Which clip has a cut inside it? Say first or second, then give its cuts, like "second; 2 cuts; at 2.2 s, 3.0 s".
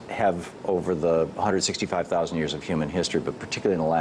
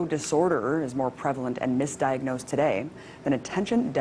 first; 1 cut; at 2.9 s